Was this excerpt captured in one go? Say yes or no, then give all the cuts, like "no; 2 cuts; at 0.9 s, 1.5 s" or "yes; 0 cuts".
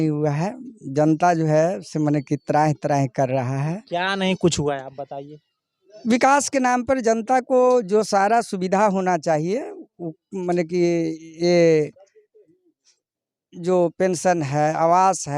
yes; 0 cuts